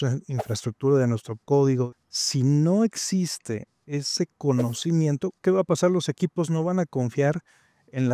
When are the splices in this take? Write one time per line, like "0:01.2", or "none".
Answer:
0:01.9